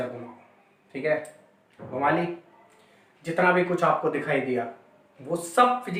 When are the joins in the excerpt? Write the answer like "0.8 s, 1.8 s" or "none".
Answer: none